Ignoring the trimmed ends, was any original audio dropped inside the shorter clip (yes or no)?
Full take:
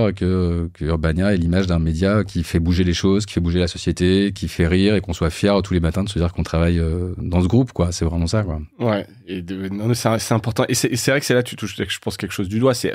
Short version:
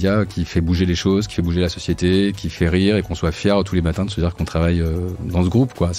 no